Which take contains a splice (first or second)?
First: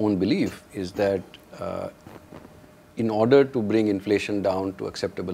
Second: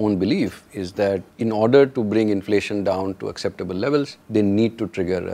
second